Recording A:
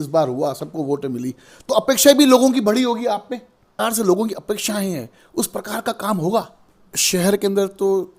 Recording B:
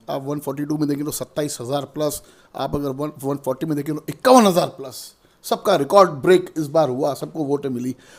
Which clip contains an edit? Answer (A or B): A